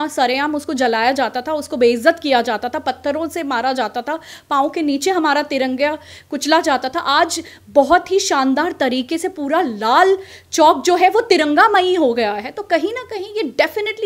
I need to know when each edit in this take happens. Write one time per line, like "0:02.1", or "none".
none